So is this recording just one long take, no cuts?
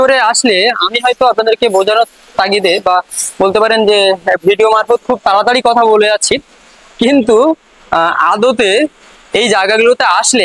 yes; 0 cuts

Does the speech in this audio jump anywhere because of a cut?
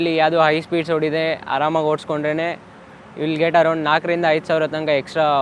no; 0 cuts

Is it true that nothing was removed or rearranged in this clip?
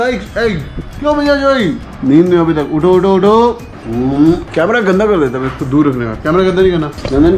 yes; 0 cuts

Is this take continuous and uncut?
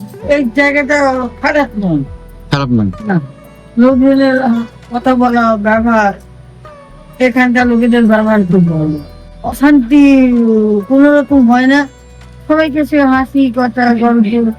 no; 1 cut; at 9.5 s

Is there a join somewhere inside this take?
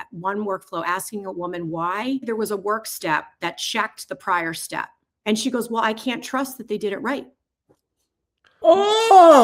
yes; 3 cuts; at 2.2 s, 5.0 s, 8.6 s

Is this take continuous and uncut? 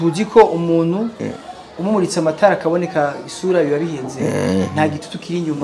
yes; 0 cuts

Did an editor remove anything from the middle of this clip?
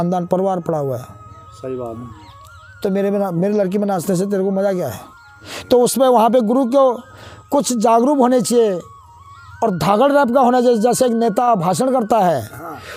no; 0 cuts

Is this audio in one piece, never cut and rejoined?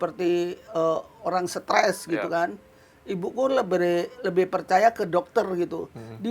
yes; 0 cuts

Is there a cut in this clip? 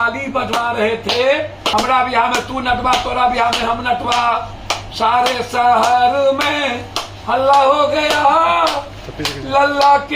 yes; 1 cut; at 1.7 s

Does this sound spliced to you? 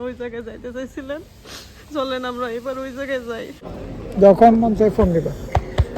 yes; 1 cut; at 3.8 s

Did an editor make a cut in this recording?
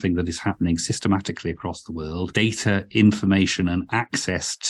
yes; 1 cut; at 2.3 s

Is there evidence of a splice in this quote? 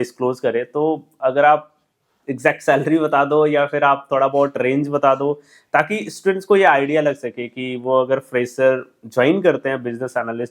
no; 0 cuts

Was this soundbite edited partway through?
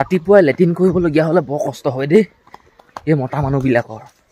no; 0 cuts

